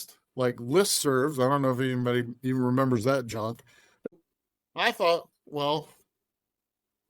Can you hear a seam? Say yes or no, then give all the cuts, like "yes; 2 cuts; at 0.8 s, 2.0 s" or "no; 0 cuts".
yes; 1 cut; at 4.1 s